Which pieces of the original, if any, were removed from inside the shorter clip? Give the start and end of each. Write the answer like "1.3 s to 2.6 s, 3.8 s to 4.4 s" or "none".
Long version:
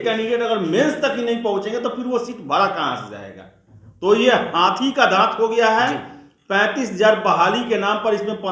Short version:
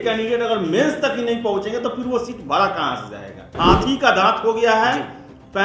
3.5 s to 4.5 s